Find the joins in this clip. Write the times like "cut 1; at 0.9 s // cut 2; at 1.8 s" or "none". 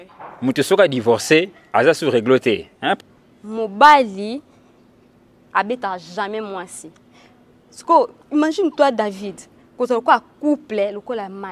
cut 1; at 3.0 s